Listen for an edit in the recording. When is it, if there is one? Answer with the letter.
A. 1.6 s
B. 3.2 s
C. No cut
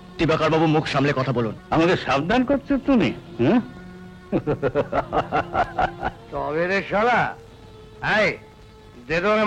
A